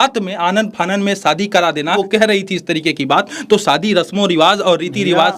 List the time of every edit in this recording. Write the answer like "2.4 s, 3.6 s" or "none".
1.9 s